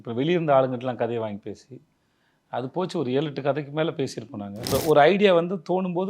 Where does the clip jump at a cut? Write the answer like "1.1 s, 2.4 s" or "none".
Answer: 4.7 s